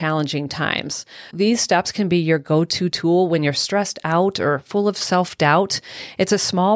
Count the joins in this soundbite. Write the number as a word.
one